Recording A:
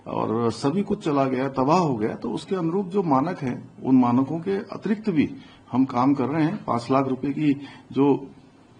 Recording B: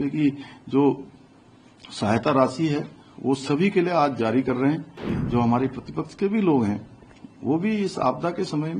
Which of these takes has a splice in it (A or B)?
B